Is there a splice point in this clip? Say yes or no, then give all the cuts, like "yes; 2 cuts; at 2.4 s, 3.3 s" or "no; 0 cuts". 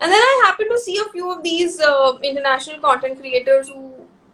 no; 0 cuts